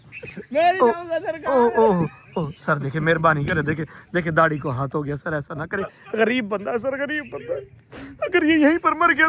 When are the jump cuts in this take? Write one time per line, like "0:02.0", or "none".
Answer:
none